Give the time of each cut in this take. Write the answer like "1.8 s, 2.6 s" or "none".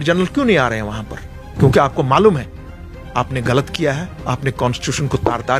1.4 s

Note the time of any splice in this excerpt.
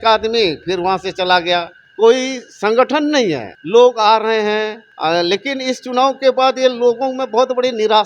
1.8 s, 3.5 s, 4.8 s

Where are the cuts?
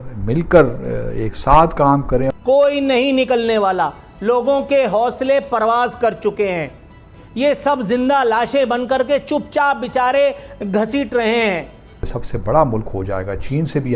2.3 s, 12.1 s

